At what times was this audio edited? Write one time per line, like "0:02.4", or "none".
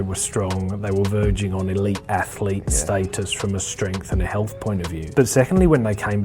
0:05.0